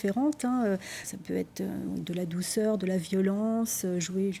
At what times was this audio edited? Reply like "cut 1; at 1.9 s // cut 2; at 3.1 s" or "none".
cut 1; at 1.0 s